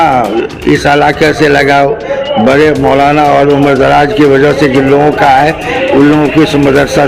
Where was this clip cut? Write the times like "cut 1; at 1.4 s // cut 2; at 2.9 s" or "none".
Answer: none